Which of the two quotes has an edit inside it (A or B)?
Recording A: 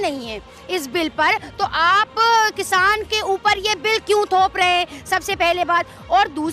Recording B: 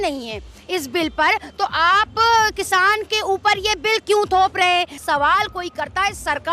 B